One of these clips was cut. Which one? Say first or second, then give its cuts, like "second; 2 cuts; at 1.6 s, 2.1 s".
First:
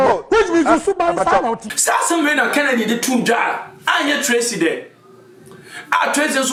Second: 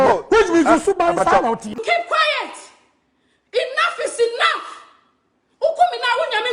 second; 1 cut; at 1.7 s